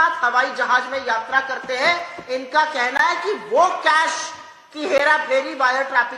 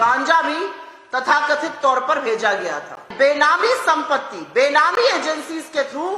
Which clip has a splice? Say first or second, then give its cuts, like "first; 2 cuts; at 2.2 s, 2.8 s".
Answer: second; 1 cut; at 3.1 s